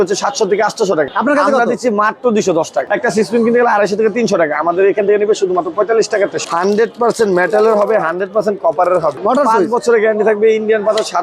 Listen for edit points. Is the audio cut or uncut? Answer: cut